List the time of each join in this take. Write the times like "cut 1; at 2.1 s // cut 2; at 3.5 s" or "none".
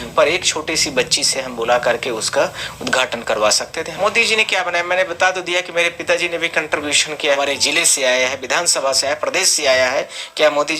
cut 1; at 3.9 s // cut 2; at 7.4 s